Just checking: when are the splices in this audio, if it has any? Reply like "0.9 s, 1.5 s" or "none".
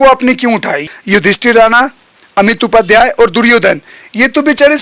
0.9 s